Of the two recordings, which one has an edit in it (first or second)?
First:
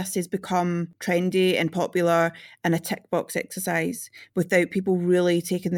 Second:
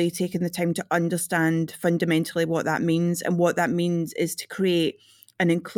first